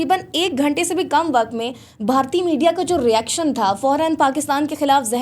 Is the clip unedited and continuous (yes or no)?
yes